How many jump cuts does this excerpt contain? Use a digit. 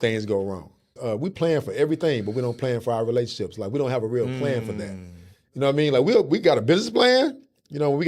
1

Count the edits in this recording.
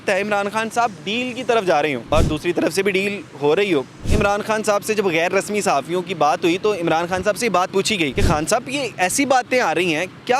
3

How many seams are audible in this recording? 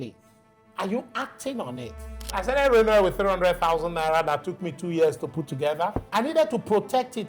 2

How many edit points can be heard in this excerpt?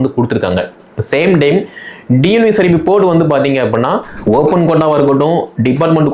1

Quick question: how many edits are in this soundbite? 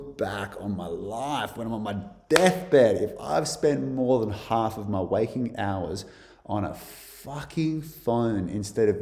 0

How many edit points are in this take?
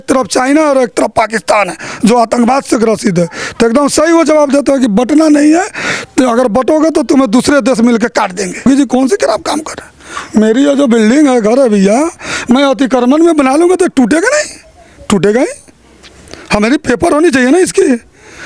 1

